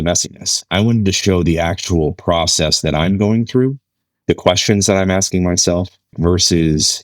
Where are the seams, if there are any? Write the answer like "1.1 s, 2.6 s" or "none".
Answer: 6.1 s